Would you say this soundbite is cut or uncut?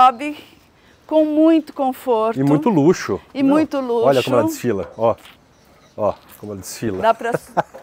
uncut